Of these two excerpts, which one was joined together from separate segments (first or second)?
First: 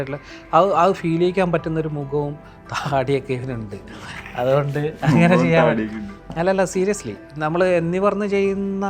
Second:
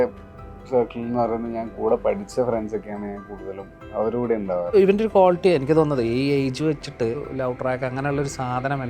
second